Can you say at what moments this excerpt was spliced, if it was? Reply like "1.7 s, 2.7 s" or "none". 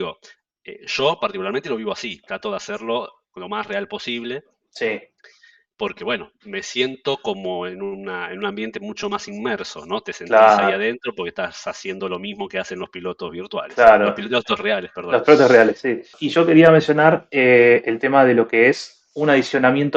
16.2 s